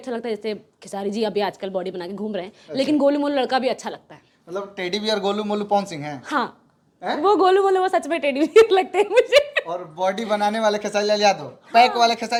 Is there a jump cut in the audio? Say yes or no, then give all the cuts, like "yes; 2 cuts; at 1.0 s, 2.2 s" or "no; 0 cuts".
no; 0 cuts